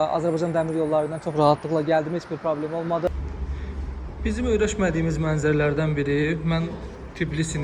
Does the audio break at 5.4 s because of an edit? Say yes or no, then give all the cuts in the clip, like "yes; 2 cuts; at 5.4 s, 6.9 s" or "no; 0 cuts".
no; 1 cut; at 3.1 s